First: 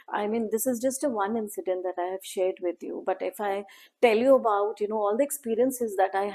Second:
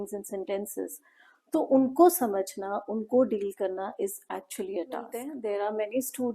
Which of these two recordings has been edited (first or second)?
second